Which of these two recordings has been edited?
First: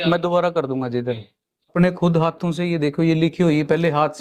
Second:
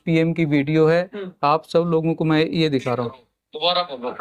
first; 1 cut; at 1.7 s

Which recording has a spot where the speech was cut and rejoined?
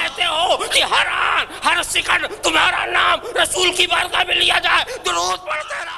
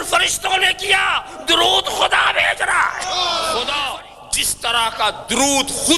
second; 1 cut; at 3.7 s

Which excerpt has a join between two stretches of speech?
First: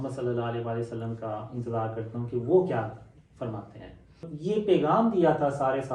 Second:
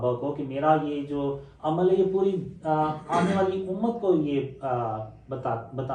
first; 1 cut; at 4.3 s

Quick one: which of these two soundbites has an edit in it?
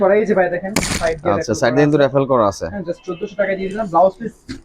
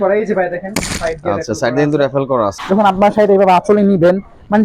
second; 1 cut; at 2.6 s

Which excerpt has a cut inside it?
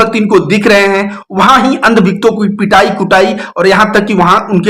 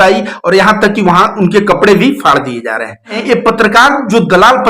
second; 1 cut; at 3.2 s

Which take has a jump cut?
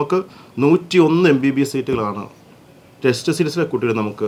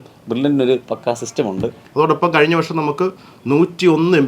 second; 1 cut; at 1.8 s

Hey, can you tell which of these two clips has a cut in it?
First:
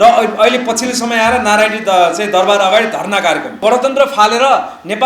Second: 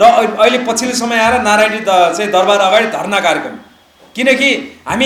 first; 1 cut; at 3.6 s

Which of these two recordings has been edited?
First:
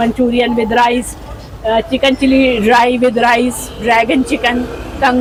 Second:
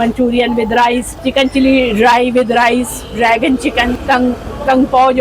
second; 2 cuts; at 1.2 s, 4.0 s

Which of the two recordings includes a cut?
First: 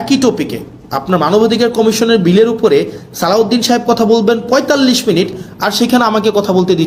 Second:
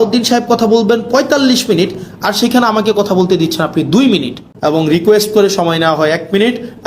second; 1 cut; at 4.5 s

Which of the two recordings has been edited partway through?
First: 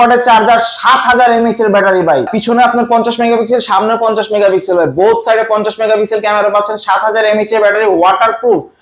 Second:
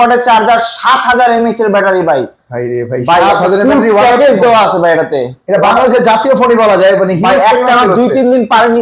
first; 1 cut; at 2.3 s

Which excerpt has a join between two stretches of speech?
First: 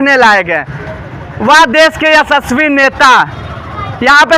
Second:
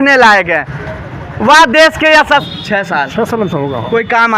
second; 1 cut; at 2.5 s

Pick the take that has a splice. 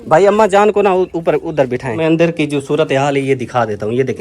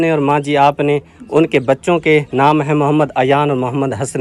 first; 1 cut; at 2.0 s

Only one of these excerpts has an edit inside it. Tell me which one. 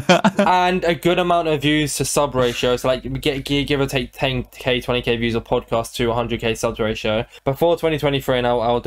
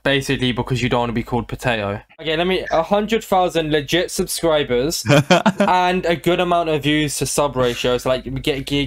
second; 1 cut; at 2.2 s

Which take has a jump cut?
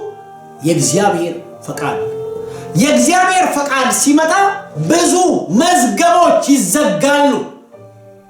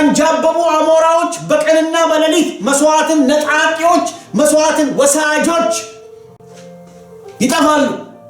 second; 1 cut; at 7.4 s

